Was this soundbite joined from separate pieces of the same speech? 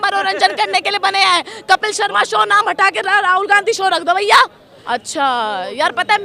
yes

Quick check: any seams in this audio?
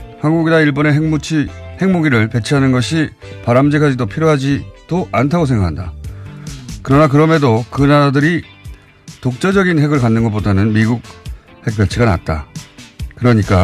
yes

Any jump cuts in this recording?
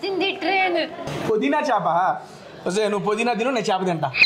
yes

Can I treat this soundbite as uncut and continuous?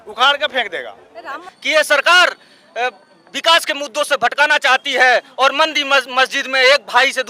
no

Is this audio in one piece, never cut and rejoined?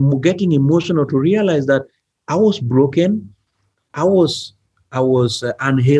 yes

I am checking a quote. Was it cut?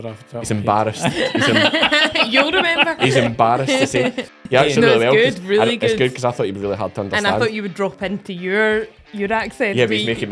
yes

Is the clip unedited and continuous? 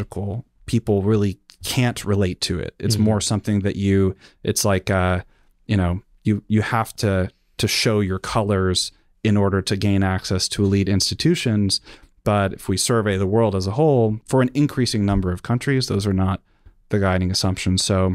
no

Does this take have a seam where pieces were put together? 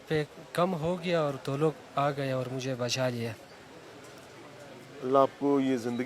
no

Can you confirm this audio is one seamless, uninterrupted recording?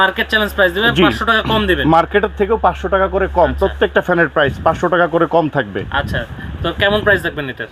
yes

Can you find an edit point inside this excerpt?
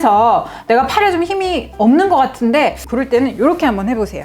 yes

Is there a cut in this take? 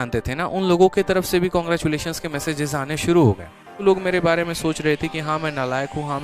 yes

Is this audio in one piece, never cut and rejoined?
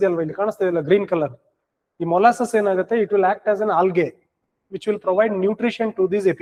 yes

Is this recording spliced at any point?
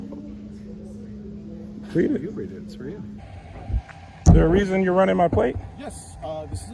yes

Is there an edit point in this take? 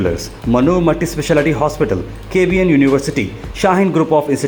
no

